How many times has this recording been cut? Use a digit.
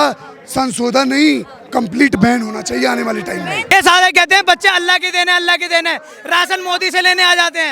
1